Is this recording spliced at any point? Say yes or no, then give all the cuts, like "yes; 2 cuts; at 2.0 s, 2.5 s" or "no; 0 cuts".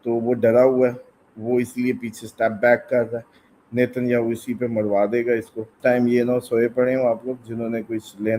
yes; 1 cut; at 5.6 s